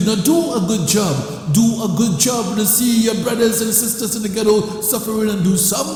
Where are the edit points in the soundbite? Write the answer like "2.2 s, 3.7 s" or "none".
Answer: none